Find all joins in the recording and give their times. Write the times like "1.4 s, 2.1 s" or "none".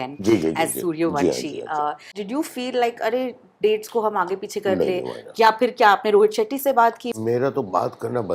2.1 s, 7.1 s